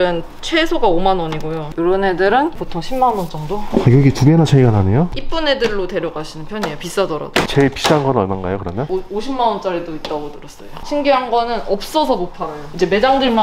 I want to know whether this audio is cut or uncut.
cut